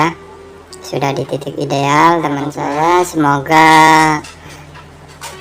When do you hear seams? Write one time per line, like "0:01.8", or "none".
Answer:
0:02.6